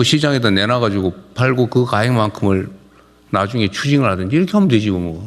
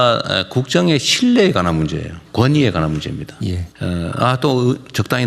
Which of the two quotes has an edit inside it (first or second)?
second